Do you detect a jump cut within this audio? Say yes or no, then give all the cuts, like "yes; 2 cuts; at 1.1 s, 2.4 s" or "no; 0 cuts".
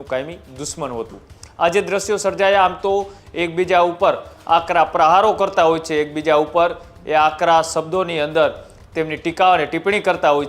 no; 0 cuts